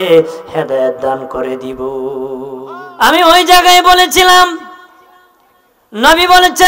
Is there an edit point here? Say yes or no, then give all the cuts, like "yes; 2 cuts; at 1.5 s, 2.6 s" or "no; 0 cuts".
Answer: yes; 1 cut; at 2.8 s